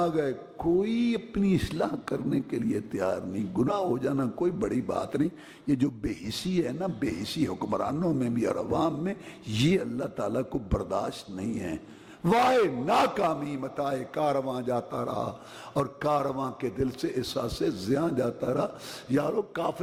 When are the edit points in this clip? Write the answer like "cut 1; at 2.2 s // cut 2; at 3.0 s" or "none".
none